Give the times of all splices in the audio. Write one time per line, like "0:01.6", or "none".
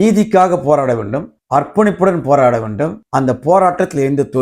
none